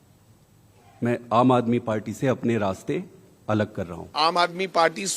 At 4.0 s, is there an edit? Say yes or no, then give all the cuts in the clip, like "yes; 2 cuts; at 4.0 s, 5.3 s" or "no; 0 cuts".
yes; 1 cut; at 4.0 s